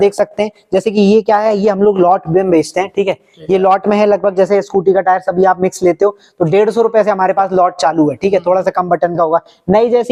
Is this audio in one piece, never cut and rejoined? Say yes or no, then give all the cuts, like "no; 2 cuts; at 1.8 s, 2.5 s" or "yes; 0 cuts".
yes; 0 cuts